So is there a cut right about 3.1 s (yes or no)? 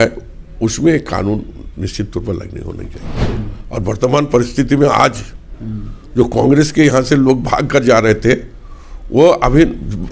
yes